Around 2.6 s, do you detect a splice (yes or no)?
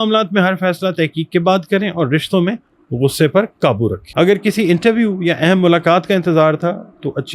no